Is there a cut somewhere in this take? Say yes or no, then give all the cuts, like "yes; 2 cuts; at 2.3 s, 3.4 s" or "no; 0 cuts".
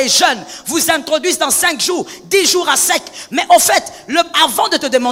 no; 0 cuts